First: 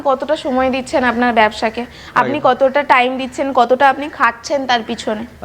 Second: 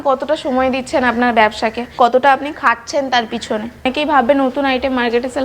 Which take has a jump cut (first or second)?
second